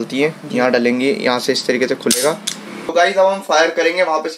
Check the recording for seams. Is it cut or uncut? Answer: cut